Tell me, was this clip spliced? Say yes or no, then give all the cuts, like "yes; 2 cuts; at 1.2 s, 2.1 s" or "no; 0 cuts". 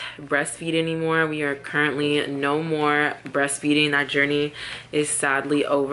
no; 0 cuts